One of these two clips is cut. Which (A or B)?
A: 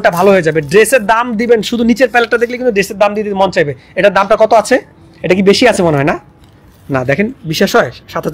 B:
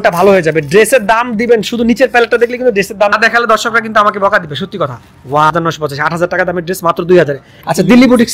B